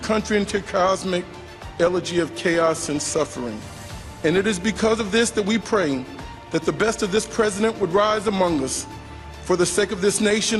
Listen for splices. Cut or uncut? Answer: uncut